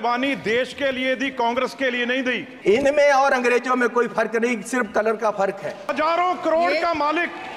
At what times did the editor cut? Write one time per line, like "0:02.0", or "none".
0:02.5
0:05.9